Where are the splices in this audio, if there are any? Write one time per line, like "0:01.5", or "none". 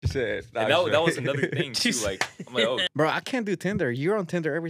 0:02.8

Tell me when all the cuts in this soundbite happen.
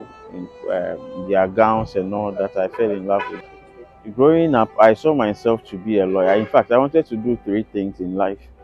0:03.3

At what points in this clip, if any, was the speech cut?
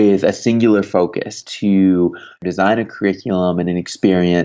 0:01.4
0:02.4

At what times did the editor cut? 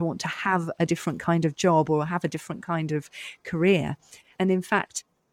0:04.3

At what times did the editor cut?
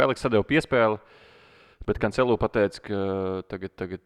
none

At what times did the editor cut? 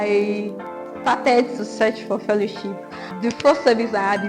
0:03.1

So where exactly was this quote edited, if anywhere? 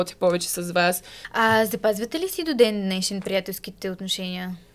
0:01.1

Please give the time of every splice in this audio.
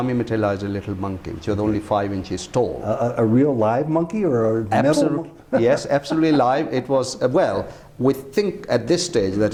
none

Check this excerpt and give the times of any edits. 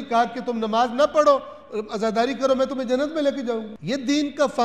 0:03.7

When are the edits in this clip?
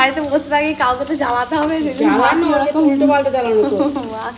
none

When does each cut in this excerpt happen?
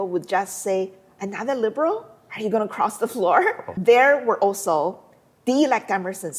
0:03.7

